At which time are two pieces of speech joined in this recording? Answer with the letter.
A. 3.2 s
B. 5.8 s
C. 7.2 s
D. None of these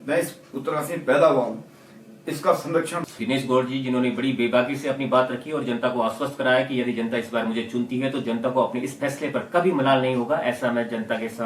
A